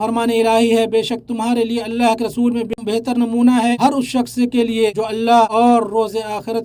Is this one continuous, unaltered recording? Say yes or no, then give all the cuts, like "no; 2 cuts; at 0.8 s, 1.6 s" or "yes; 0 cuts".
no; 1 cut; at 2.7 s